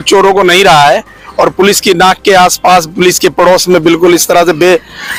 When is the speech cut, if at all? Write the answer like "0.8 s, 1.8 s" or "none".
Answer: none